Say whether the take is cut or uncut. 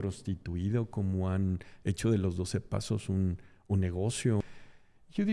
cut